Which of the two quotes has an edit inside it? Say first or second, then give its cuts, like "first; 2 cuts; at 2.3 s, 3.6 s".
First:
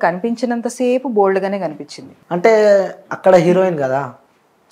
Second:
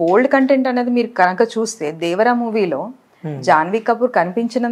first; 1 cut; at 2.2 s